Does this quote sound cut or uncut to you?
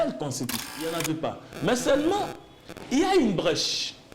cut